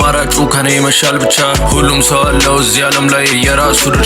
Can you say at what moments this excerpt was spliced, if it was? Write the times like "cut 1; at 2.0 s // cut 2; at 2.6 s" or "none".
cut 1; at 2.6 s